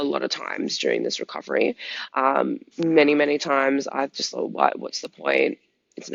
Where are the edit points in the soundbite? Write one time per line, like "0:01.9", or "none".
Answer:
none